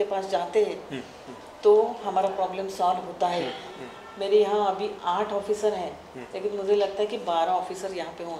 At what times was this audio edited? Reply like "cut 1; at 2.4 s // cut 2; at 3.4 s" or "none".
cut 1; at 3.7 s